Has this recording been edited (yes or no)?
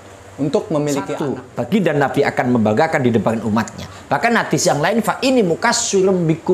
yes